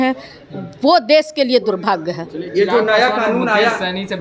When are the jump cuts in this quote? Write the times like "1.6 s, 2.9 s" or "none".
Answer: none